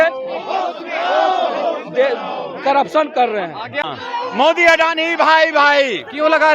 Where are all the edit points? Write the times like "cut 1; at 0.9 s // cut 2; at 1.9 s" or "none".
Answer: cut 1; at 3.7 s